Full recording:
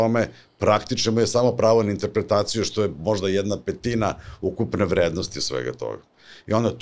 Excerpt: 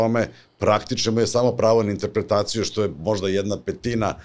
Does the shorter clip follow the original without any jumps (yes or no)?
yes